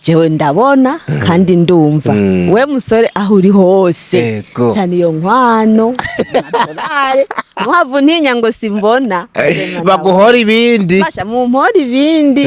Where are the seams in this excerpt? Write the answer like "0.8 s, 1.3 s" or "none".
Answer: none